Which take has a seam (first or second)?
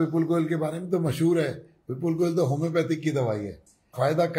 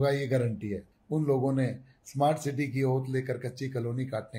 second